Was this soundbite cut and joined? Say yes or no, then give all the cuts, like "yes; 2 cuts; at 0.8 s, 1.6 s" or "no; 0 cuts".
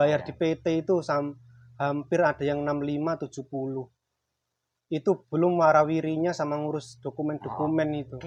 no; 0 cuts